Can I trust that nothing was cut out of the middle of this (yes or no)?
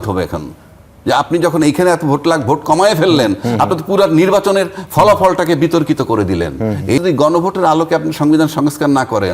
no